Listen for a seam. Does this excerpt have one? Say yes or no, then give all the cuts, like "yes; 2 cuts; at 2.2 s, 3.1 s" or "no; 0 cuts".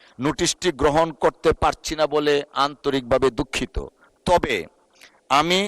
no; 0 cuts